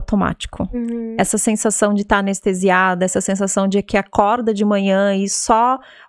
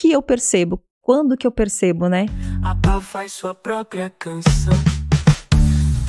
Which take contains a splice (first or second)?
second